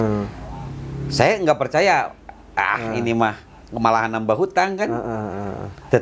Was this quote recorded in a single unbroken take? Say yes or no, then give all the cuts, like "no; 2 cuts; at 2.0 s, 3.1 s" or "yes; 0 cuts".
yes; 0 cuts